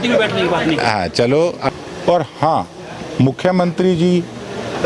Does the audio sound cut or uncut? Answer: cut